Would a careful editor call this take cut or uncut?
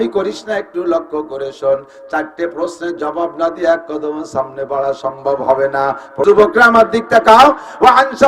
cut